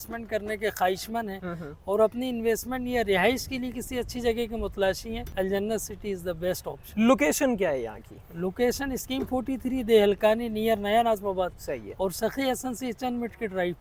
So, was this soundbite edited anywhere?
no; 0 cuts

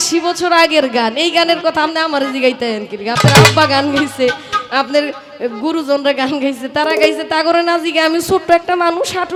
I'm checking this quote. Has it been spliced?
no; 0 cuts

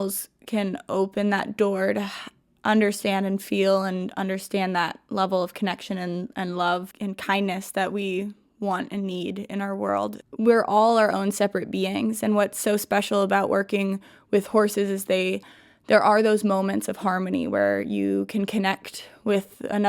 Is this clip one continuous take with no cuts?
no; 1 cut; at 10.2 s

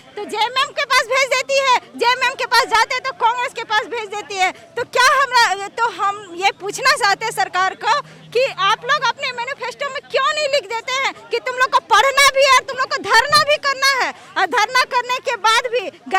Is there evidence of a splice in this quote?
no; 0 cuts

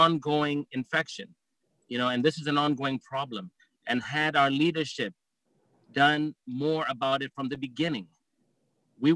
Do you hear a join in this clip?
no; 0 cuts

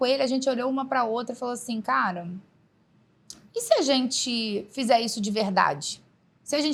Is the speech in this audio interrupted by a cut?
no; 0 cuts

